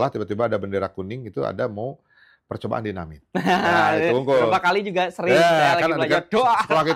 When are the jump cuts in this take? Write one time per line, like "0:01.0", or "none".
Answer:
none